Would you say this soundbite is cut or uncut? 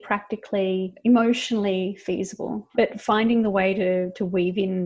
cut